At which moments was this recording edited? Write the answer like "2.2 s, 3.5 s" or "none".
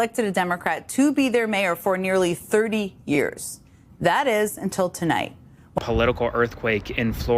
5.7 s